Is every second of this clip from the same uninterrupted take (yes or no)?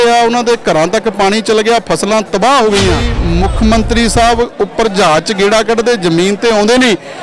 no